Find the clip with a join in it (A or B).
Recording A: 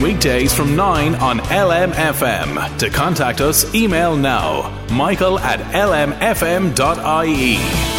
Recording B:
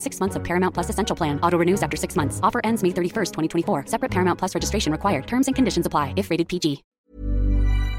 B